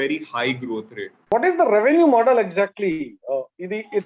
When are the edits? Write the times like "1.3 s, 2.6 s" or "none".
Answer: 1.2 s